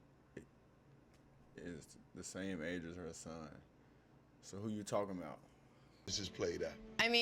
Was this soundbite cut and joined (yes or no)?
yes